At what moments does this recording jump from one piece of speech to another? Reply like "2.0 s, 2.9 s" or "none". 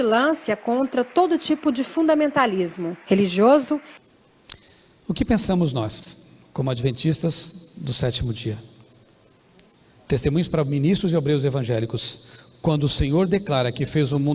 4.0 s